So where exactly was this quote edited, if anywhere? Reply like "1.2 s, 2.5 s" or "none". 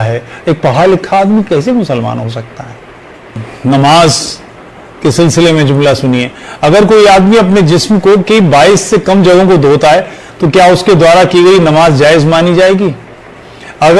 3.4 s